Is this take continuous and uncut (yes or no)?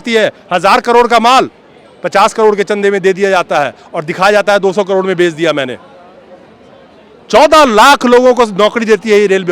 yes